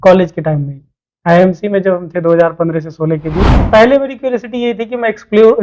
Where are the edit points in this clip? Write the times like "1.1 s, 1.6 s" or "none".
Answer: 3.6 s

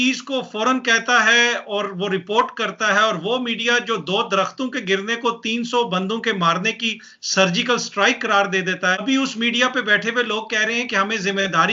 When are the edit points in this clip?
9.0 s

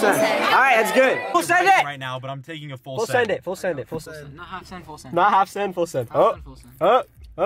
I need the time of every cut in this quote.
1.2 s, 4.0 s

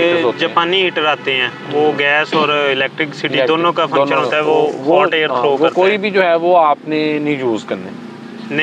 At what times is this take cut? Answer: none

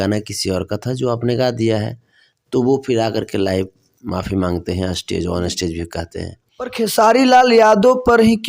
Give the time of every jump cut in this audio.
6.7 s

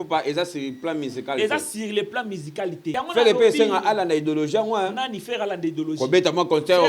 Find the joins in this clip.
2.9 s

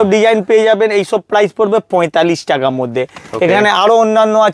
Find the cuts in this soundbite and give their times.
none

